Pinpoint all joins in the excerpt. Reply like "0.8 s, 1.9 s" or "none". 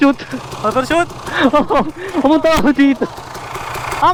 none